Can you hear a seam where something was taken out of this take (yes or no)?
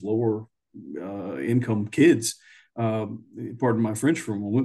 no